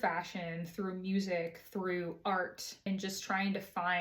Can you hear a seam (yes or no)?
yes